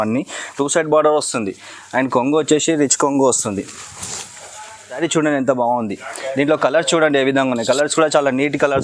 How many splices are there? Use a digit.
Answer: 1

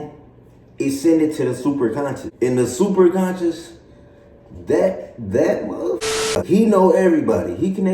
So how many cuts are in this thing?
1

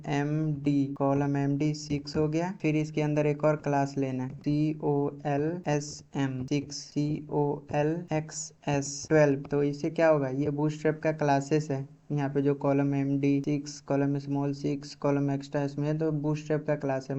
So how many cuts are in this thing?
1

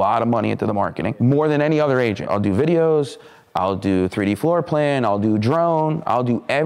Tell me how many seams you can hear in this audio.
2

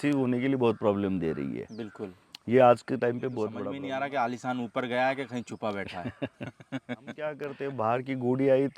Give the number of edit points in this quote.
2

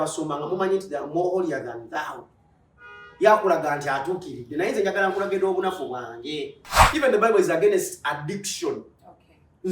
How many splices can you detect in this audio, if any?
1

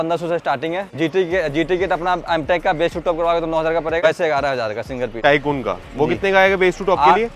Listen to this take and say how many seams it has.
3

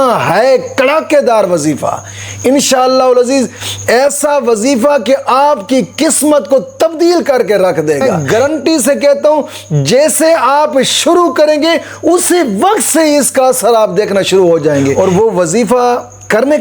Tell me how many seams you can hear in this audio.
2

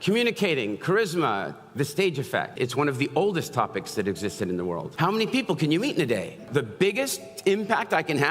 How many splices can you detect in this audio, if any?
3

